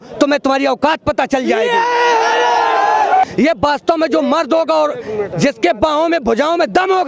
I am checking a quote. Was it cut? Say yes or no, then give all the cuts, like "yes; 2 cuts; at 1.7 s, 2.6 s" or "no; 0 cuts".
yes; 1 cut; at 3.2 s